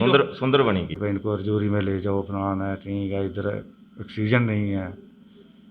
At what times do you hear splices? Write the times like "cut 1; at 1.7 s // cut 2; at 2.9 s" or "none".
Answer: cut 1; at 0.9 s

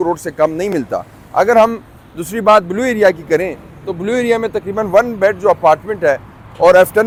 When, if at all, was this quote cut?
none

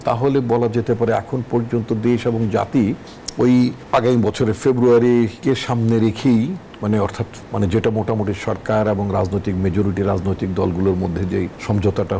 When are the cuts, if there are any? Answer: none

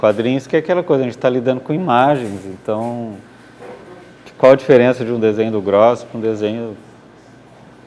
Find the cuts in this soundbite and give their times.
none

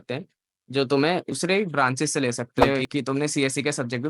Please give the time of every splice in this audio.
cut 1; at 1.3 s // cut 2; at 2.7 s

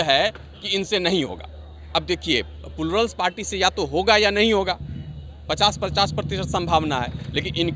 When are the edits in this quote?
none

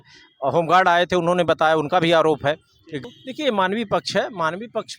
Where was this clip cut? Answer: cut 1; at 3.0 s

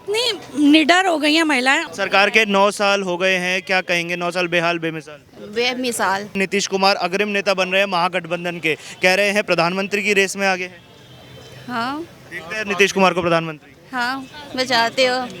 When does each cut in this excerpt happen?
cut 1; at 1.9 s // cut 2; at 6.4 s

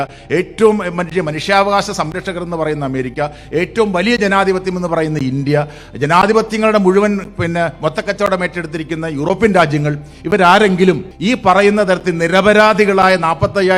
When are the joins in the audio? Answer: cut 1; at 11.1 s

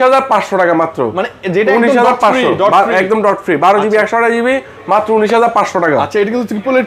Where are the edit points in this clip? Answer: none

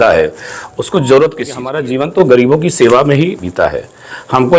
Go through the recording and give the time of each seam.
cut 1; at 1.8 s

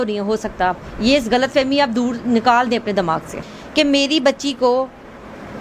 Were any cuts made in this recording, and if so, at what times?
cut 1; at 3.3 s

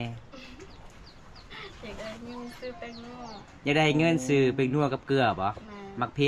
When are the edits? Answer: none

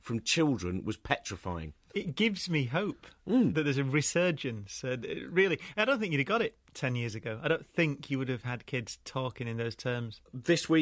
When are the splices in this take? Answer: cut 1; at 1.7 s

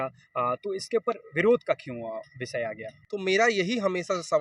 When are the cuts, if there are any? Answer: cut 1; at 3.0 s

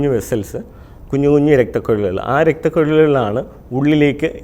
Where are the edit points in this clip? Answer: none

